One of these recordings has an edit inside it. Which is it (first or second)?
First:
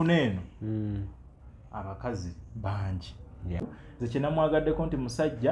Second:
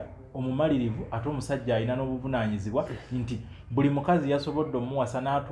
first